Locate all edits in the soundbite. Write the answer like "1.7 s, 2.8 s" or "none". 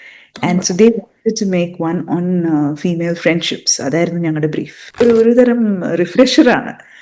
5.0 s